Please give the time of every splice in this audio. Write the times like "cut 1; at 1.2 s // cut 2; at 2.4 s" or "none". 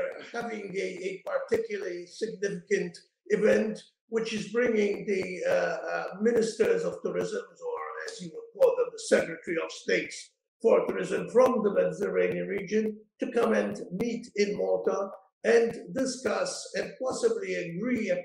none